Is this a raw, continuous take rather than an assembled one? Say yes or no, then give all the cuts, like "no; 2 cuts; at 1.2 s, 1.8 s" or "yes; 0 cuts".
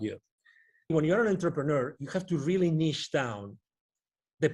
no; 1 cut; at 0.9 s